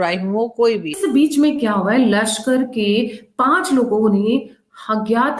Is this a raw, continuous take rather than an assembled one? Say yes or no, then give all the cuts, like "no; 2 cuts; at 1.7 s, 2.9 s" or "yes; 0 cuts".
no; 1 cut; at 1.0 s